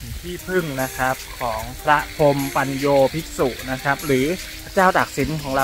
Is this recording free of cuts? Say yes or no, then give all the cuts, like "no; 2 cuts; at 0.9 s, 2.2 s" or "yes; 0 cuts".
no; 1 cut; at 4.5 s